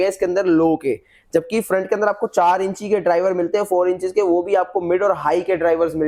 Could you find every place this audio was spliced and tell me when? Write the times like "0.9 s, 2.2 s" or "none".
none